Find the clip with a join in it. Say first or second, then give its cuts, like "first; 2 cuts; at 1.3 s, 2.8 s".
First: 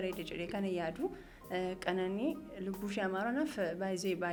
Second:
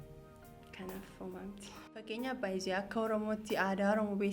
second; 1 cut; at 2.1 s